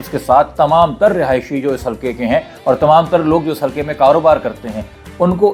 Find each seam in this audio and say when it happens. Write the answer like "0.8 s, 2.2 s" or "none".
none